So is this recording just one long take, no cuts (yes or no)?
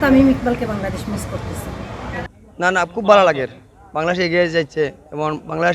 no